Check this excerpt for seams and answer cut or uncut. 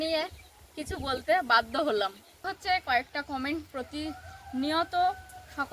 cut